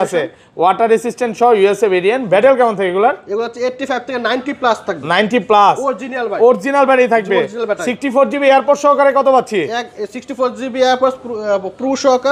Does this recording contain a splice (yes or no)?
no